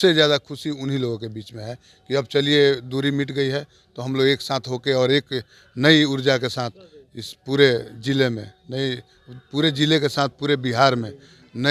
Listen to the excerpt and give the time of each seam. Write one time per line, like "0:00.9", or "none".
none